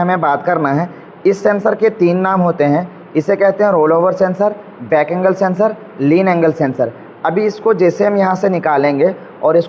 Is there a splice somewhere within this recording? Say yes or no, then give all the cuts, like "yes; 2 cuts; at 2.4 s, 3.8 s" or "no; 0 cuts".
no; 0 cuts